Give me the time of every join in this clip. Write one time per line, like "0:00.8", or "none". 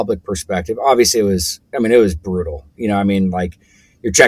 none